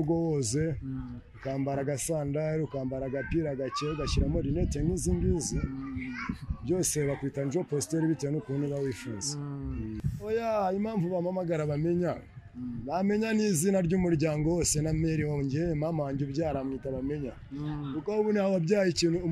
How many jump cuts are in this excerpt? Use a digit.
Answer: 1